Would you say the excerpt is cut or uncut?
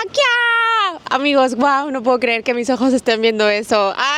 uncut